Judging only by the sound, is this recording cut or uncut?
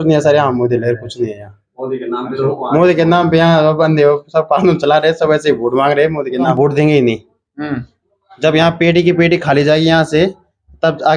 cut